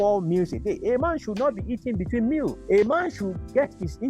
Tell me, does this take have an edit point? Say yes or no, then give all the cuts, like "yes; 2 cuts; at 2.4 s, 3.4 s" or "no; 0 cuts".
yes; 1 cut; at 2.6 s